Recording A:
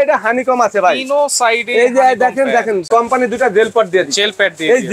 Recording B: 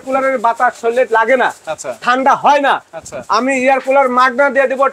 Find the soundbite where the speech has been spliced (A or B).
A